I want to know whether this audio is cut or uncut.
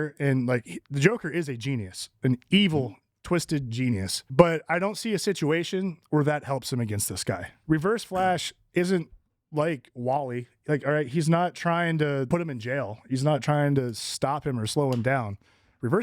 cut